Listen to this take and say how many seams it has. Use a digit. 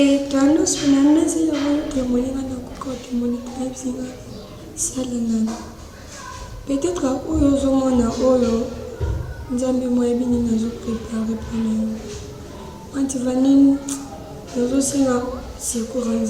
0